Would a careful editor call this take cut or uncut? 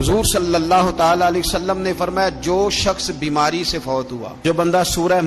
cut